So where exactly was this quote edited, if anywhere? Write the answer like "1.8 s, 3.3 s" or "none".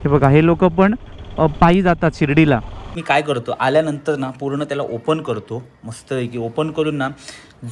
2.9 s